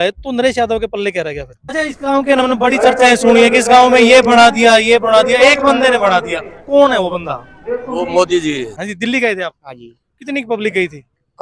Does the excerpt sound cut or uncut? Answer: cut